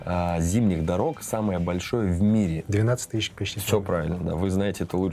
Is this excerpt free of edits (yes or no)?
yes